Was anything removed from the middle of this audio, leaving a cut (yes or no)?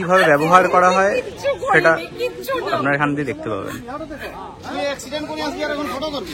no